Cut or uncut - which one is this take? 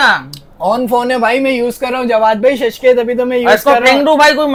uncut